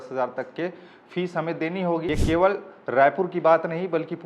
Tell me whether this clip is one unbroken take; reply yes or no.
no